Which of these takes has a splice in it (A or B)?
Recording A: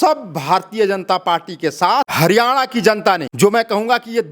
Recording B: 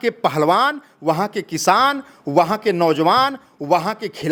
A